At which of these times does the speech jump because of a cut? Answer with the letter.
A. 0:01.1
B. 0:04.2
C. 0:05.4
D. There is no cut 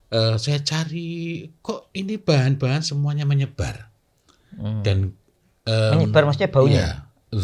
D